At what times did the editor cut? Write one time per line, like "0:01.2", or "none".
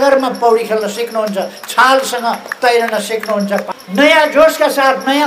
0:03.8